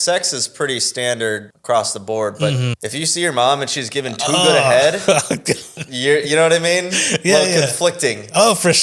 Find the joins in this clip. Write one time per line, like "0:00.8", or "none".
0:01.5
0:02.8
0:05.7